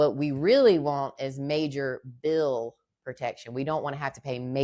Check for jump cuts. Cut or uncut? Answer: uncut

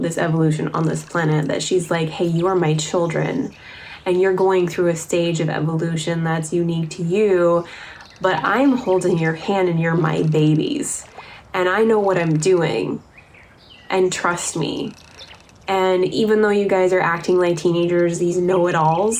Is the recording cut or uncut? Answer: uncut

